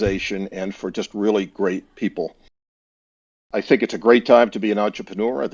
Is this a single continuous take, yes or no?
yes